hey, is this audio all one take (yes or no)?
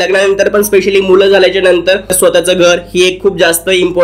yes